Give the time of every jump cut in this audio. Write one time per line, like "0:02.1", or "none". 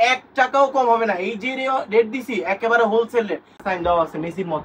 0:03.5